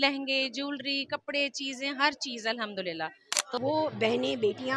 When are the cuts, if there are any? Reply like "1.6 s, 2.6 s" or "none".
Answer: 3.6 s